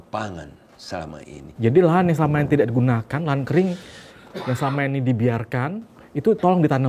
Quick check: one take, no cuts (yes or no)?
no